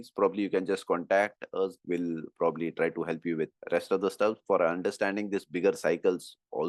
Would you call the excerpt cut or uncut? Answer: cut